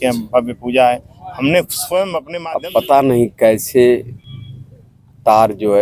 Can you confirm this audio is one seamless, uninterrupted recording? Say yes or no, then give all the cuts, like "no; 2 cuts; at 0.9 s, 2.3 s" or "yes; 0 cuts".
no; 1 cut; at 2.3 s